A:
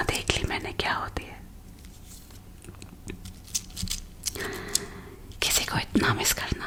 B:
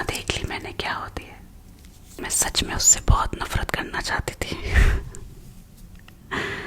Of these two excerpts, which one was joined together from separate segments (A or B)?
B